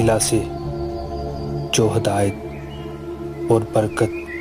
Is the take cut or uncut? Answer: uncut